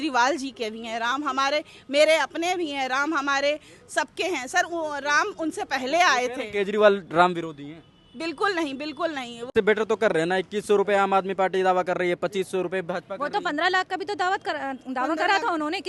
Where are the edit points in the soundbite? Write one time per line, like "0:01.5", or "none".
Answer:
0:09.5